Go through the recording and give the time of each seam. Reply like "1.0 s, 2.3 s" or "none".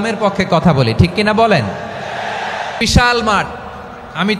2.8 s